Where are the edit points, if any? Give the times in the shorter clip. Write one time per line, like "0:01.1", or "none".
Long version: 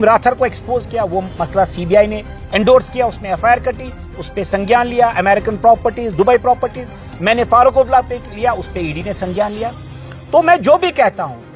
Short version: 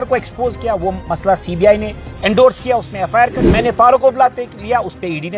0:03.5